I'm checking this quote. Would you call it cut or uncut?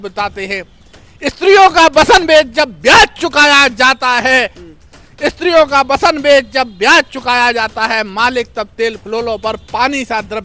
uncut